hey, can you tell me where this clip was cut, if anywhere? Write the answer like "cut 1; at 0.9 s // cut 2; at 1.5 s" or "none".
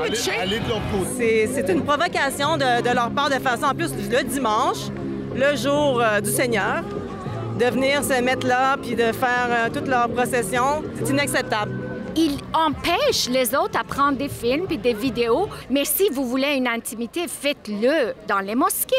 cut 1; at 1.1 s // cut 2; at 11.0 s // cut 3; at 12.1 s